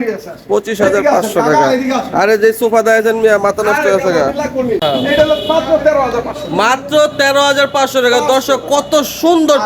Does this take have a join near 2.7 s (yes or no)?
no